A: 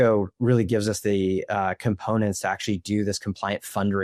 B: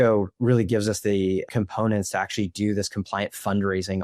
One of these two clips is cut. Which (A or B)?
B